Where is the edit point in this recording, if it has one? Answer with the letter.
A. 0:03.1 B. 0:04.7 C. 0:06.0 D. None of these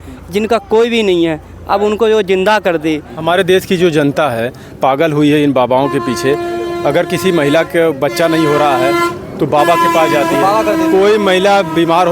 A